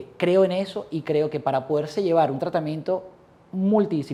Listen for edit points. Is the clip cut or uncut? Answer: uncut